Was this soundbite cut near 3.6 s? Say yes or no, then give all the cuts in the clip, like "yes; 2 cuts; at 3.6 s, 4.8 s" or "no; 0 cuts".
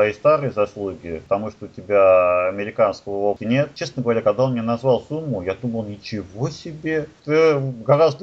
yes; 3 cuts; at 1.1 s, 3.6 s, 7.2 s